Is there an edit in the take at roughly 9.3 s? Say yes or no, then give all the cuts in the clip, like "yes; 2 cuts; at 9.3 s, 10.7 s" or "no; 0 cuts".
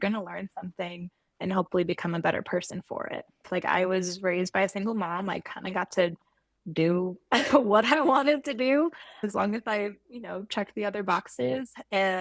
yes; 2 cuts; at 3.4 s, 9.3 s